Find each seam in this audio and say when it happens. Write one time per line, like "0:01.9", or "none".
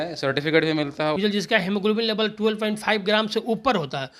0:01.2